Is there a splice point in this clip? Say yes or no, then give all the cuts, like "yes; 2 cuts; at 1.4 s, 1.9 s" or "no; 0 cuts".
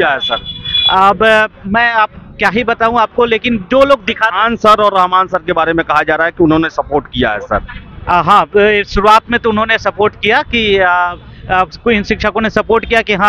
no; 0 cuts